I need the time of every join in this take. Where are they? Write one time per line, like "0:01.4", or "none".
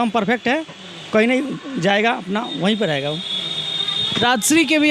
none